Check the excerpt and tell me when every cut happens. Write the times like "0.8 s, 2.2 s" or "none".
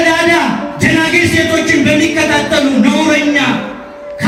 none